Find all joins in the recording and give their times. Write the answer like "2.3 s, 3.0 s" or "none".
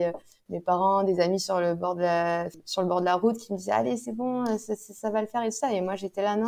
2.6 s